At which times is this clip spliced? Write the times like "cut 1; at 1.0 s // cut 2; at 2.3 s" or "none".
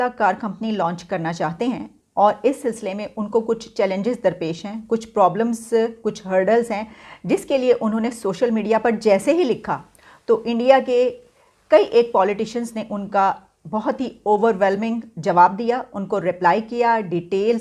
none